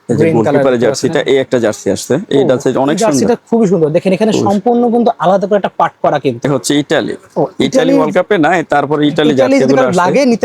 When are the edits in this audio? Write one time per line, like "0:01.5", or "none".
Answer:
0:06.5